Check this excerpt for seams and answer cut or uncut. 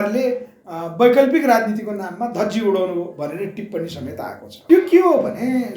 cut